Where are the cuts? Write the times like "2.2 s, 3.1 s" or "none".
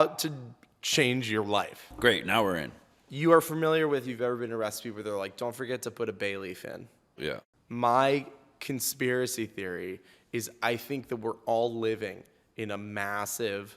1.8 s, 7.3 s

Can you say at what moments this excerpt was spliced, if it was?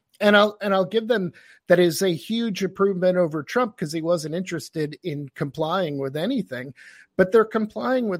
none

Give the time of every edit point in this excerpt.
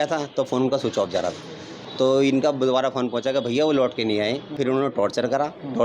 1.7 s, 4.6 s

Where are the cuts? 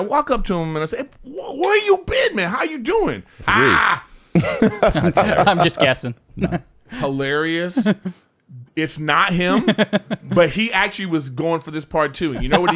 3.4 s

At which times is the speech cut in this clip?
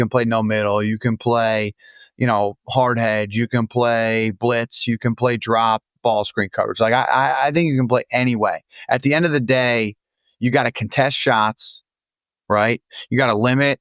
none

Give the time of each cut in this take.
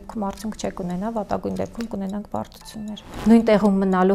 3.1 s

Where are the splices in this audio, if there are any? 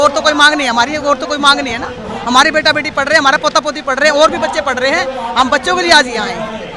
none

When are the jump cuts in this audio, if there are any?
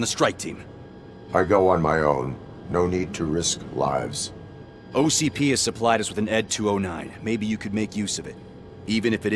6.5 s

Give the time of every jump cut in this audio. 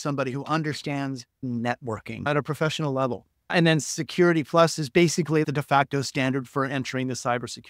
1.3 s, 2.3 s, 3.5 s, 5.4 s

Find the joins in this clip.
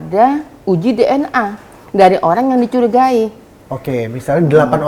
none

